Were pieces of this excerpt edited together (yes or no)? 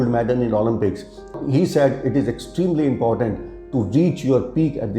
yes